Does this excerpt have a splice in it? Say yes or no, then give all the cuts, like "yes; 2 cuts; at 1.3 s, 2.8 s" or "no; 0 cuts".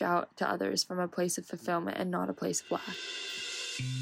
yes; 1 cut; at 3.1 s